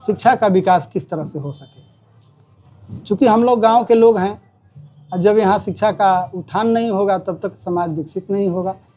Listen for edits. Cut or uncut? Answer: uncut